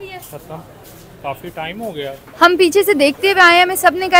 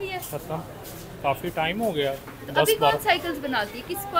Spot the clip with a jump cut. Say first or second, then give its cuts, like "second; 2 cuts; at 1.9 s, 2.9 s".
first; 1 cut; at 2.2 s